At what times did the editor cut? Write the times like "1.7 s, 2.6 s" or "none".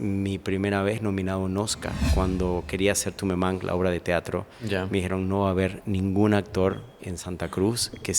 2.1 s